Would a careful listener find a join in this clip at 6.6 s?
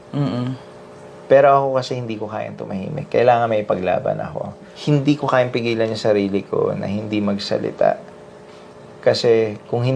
no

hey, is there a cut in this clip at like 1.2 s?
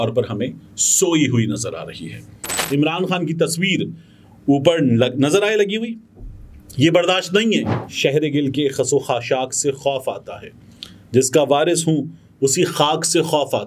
no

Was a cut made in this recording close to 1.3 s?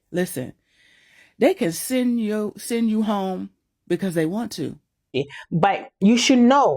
no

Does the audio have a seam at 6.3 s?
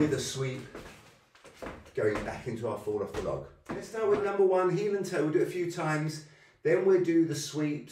no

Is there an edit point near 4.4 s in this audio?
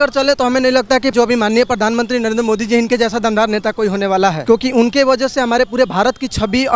yes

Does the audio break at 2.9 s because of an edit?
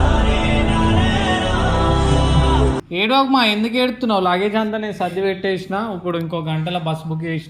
yes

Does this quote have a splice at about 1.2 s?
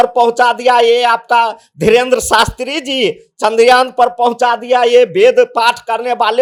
no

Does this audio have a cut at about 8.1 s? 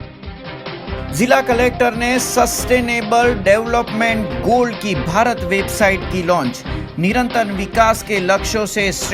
no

